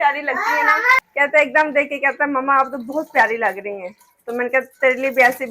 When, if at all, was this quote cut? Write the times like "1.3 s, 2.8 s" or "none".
1.0 s